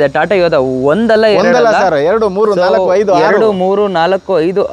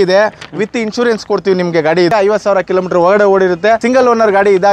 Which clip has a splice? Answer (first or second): second